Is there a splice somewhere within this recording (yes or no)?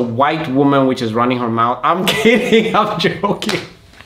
no